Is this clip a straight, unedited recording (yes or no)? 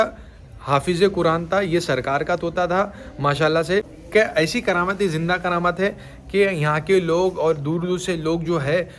yes